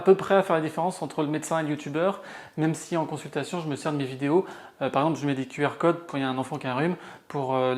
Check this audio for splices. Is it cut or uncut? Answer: uncut